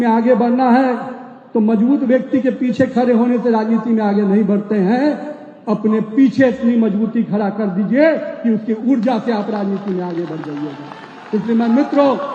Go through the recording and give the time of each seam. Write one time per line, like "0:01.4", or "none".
none